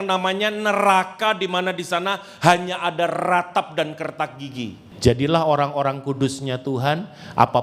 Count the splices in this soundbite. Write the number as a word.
one